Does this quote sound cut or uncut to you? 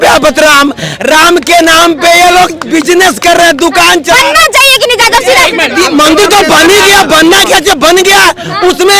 uncut